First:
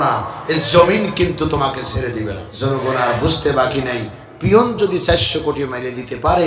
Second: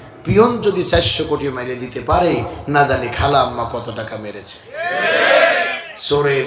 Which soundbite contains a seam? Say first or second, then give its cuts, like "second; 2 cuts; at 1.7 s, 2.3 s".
first; 1 cut; at 2.5 s